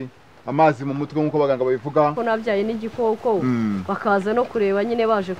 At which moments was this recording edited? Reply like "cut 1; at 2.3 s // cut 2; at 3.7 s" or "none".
cut 1; at 2.2 s